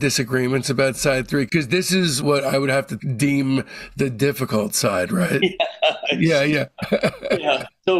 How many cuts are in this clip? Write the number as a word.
zero